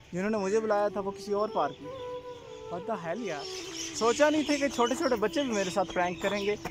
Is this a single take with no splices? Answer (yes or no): no